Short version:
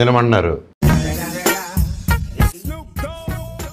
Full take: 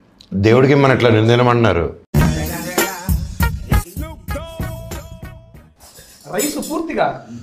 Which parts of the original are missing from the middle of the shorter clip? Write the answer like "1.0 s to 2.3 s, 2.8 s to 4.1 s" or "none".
none